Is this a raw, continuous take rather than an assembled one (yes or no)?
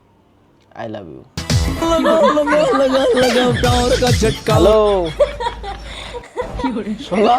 no